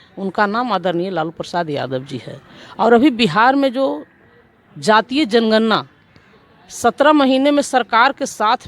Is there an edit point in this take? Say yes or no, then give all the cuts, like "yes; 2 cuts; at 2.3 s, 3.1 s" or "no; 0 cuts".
no; 0 cuts